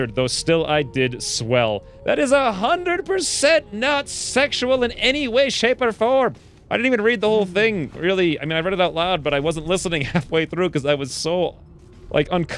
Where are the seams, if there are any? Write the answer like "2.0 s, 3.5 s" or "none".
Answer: none